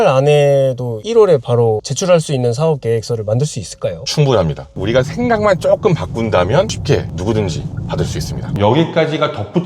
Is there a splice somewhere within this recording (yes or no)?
yes